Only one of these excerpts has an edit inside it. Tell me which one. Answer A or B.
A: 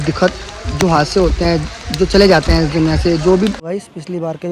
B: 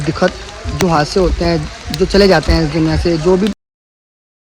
A